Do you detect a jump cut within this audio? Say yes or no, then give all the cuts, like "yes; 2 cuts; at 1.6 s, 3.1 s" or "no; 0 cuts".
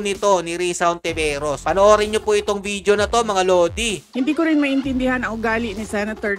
no; 0 cuts